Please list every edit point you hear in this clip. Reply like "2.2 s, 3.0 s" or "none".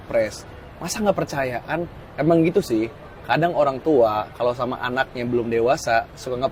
none